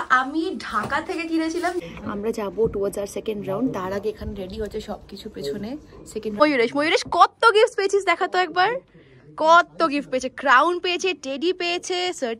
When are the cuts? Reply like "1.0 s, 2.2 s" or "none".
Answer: 1.8 s, 6.4 s